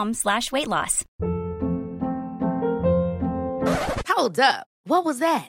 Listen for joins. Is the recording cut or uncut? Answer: cut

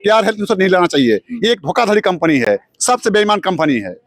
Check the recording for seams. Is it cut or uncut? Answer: uncut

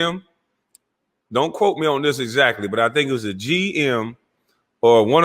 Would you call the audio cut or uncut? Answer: uncut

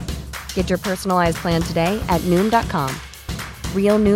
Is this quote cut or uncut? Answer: uncut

